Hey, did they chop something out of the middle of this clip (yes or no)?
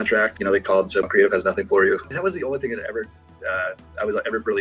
yes